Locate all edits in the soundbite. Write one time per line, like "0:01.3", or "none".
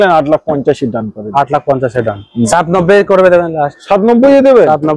0:02.5

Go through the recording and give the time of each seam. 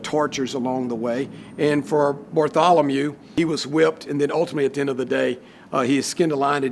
0:03.3

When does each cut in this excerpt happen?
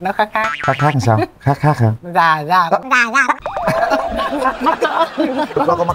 none

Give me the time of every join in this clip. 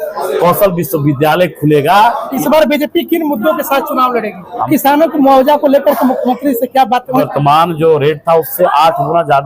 0:02.3
0:04.7
0:07.2

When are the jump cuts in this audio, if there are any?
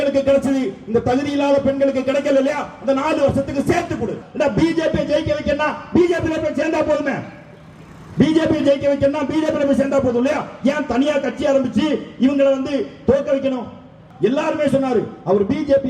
0:04.2
0:14.0

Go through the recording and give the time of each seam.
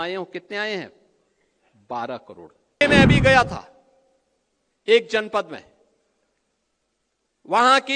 0:02.8

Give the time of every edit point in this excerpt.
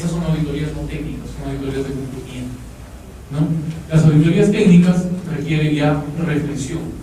0:06.0

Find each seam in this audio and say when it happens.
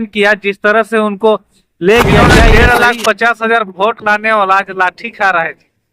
0:02.5

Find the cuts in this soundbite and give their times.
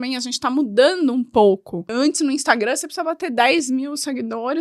0:01.9

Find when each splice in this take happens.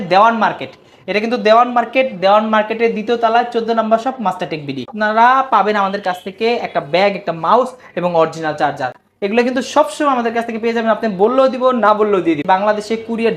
0:04.9
0:12.4

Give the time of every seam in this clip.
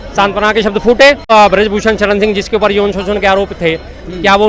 0:01.3

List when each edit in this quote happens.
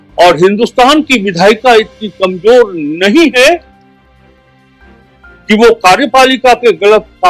0:03.7
0:05.5

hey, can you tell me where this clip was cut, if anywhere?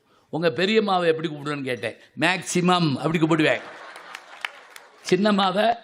none

